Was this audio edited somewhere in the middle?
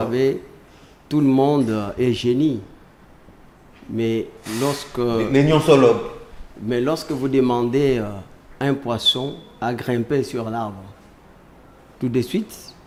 no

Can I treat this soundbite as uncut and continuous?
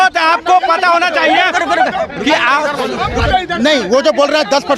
yes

